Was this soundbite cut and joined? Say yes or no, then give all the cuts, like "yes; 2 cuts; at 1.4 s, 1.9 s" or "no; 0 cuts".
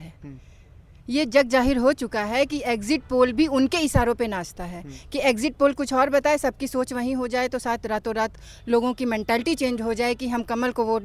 no; 0 cuts